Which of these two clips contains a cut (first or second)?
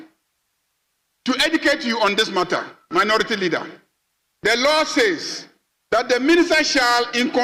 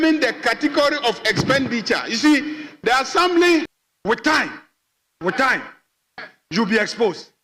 second